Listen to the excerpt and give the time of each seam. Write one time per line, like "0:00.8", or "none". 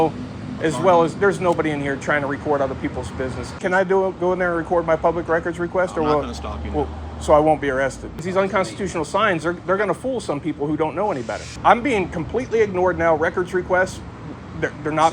0:03.6
0:08.2
0:11.5